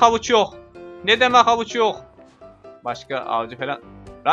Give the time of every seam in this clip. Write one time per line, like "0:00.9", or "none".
0:02.6

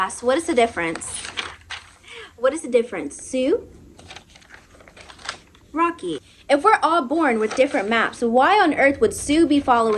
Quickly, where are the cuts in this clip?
0:06.3

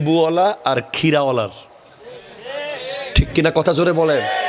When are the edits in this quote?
none

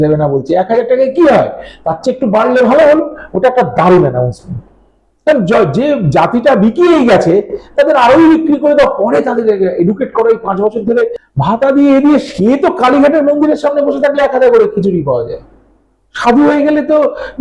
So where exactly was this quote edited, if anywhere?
0:11.2

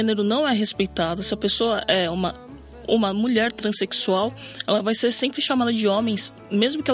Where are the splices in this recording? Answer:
none

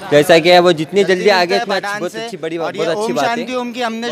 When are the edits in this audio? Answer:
0:03.1

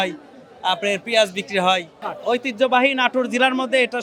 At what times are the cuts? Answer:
0:02.1

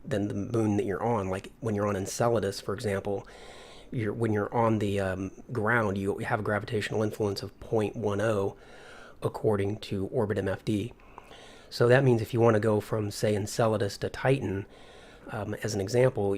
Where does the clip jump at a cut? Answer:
0:13.9

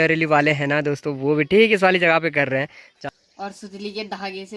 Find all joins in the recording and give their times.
0:02.7

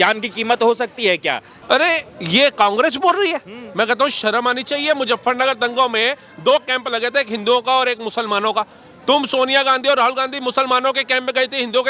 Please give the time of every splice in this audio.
0:01.5

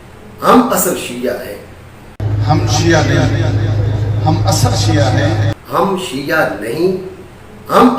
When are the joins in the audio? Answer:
0:02.1
0:05.6

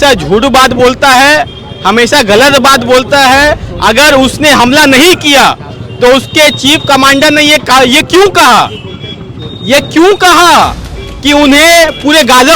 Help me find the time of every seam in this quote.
none

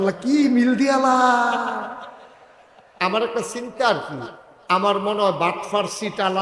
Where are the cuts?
0:02.9

